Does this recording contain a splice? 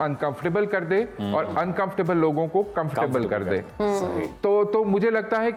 no; 0 cuts

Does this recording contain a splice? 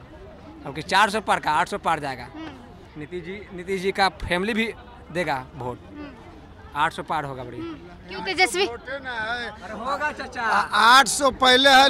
no; 0 cuts

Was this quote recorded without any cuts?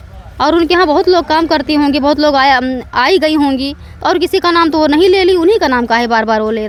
yes; 0 cuts

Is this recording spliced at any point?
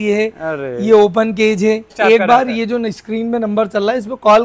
yes; 1 cut; at 1.9 s

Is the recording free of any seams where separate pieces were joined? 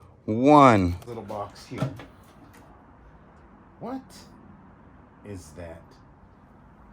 no; 1 cut; at 1.0 s

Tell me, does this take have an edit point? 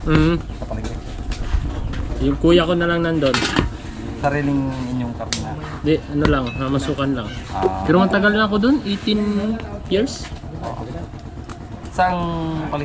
no; 0 cuts

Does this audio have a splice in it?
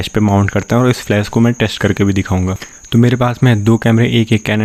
no; 0 cuts

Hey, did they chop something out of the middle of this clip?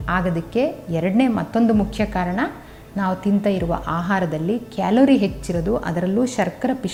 no; 0 cuts

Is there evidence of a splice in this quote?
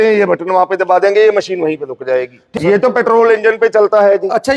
yes; 1 cut; at 2.6 s

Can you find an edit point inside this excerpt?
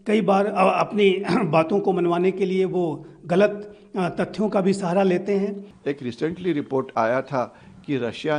yes; 1 cut; at 5.7 s

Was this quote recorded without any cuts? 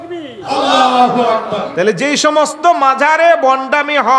no; 1 cut; at 1.7 s

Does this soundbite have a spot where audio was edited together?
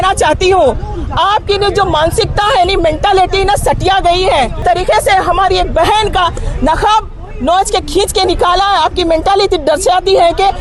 yes; 1 cut; at 4.6 s

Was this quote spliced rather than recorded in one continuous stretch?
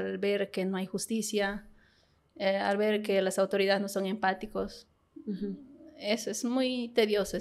no; 0 cuts

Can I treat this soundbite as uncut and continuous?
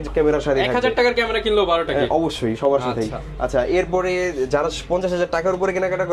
yes; 0 cuts

